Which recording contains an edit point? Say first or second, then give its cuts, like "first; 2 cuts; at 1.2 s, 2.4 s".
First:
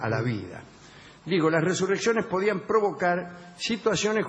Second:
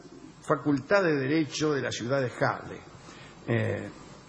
first; 1 cut; at 2.6 s